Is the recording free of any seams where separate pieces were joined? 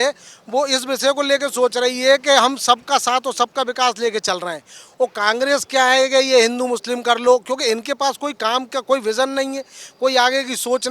yes; 0 cuts

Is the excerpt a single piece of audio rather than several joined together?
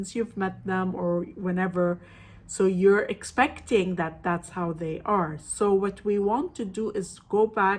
yes; 0 cuts

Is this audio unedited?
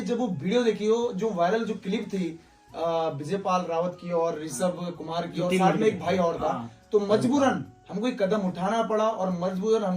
yes; 0 cuts

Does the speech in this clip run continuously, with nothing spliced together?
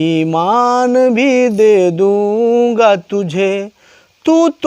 yes; 0 cuts

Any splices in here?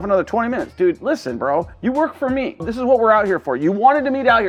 no; 0 cuts

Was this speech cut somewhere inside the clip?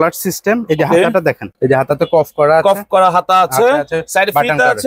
yes; 1 cut; at 1.5 s

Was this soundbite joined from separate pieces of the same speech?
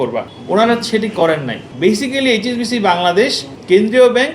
yes; 1 cut; at 1.7 s

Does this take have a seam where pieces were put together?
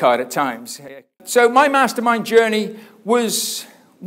yes; 1 cut; at 1.1 s

